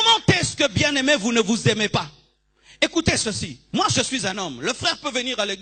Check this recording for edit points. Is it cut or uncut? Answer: uncut